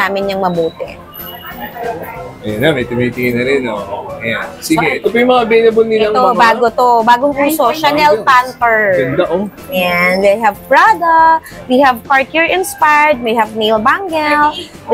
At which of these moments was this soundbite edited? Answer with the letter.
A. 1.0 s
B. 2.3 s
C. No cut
C